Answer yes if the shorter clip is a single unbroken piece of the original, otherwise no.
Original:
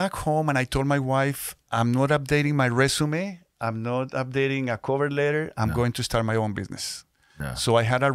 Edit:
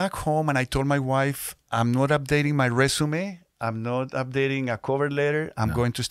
yes